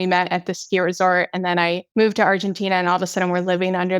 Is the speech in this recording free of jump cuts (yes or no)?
no